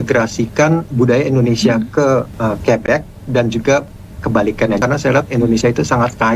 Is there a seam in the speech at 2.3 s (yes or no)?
yes